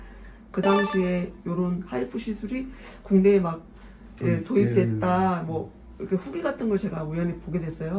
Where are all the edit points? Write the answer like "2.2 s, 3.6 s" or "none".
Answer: none